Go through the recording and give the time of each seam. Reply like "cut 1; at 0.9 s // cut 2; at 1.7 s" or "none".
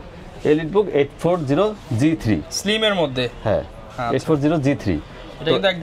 none